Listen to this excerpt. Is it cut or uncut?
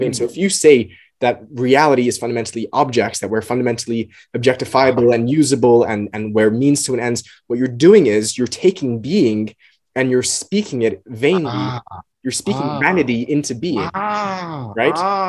uncut